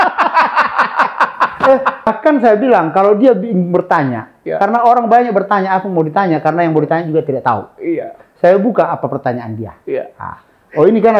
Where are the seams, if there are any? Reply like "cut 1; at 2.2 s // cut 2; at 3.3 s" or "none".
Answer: cut 1; at 2.1 s